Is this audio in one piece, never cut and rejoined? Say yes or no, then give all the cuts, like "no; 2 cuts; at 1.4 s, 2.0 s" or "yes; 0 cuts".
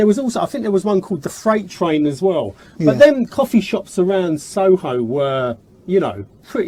yes; 0 cuts